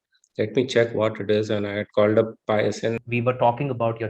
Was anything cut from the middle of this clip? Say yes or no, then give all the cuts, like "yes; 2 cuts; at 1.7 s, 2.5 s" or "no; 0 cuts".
yes; 1 cut; at 3.0 s